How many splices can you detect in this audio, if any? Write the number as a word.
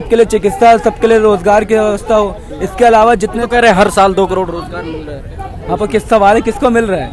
zero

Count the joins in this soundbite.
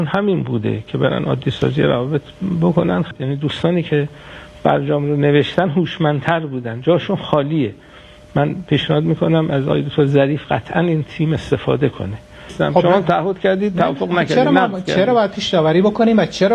two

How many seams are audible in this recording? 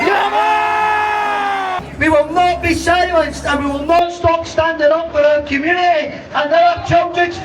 one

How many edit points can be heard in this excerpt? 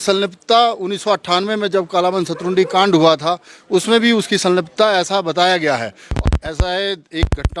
one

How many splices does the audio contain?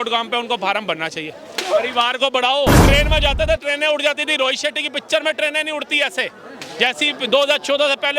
one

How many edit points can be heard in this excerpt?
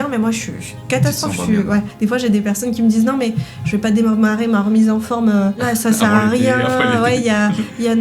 two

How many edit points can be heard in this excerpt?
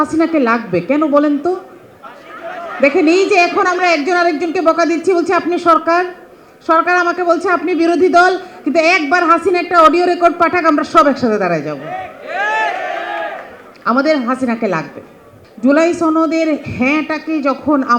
zero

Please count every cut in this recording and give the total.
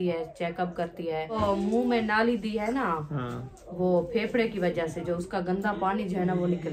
one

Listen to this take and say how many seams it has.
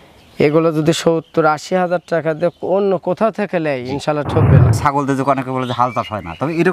one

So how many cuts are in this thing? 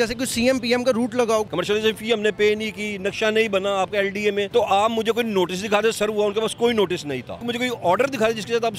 three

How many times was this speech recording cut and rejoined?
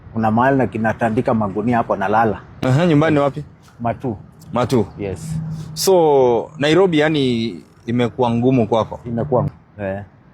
two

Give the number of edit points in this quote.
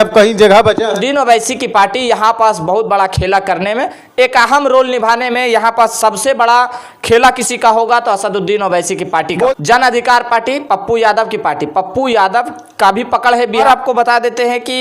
three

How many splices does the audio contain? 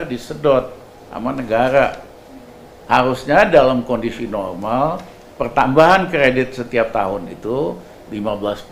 zero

